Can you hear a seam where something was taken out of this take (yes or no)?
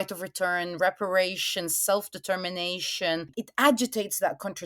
yes